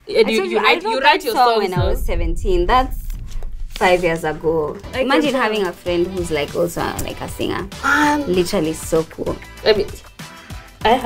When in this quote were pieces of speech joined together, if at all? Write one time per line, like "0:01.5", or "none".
0:04.9